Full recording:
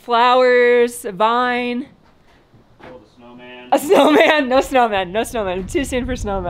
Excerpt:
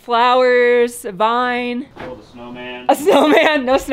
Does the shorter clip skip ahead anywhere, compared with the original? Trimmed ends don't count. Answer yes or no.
yes